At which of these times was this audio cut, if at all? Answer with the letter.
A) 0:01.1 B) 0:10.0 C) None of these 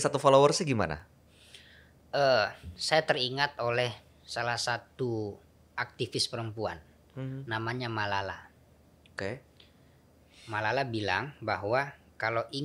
C